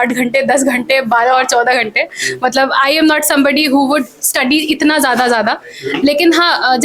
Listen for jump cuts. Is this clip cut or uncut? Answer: uncut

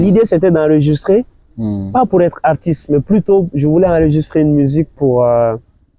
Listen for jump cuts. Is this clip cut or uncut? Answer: uncut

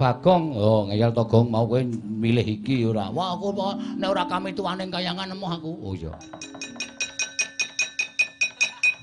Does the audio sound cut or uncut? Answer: cut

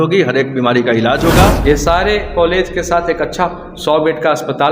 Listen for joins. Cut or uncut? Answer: cut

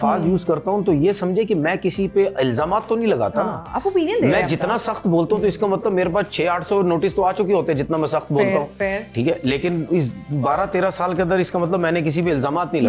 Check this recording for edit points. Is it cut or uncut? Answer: uncut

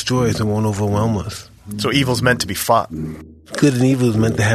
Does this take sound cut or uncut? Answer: cut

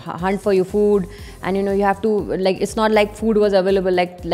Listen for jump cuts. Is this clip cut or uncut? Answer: uncut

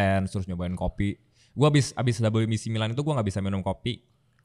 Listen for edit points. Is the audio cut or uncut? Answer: uncut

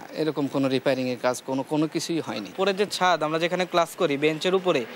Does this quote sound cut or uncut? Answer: cut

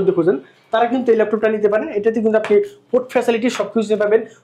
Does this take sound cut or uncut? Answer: uncut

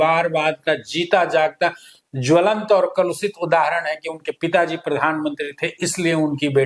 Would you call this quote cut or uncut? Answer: uncut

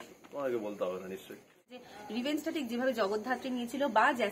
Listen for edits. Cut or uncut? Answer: cut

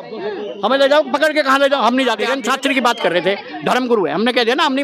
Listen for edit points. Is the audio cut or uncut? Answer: cut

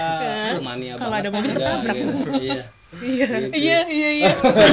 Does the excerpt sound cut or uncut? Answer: uncut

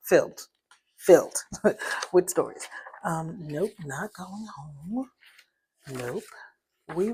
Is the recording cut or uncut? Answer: uncut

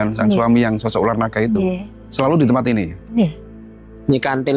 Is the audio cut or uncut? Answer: cut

